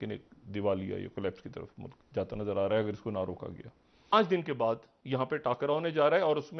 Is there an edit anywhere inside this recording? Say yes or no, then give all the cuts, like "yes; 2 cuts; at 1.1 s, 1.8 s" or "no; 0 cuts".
yes; 1 cut; at 4.1 s